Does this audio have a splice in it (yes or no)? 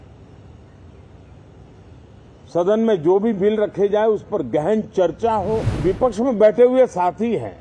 yes